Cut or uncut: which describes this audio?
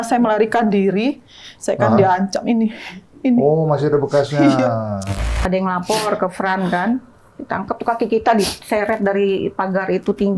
cut